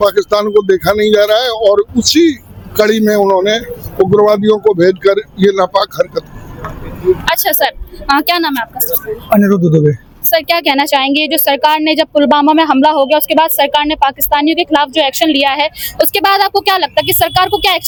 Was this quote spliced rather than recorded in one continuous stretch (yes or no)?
no